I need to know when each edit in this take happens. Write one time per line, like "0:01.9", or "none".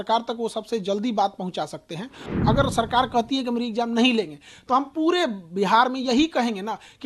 0:02.3